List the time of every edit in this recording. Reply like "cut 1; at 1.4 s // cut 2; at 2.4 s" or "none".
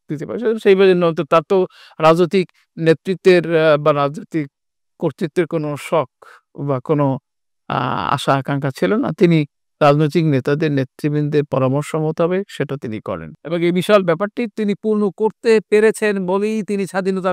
cut 1; at 13.3 s